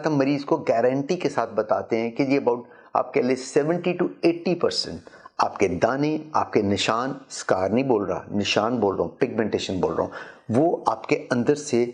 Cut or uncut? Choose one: uncut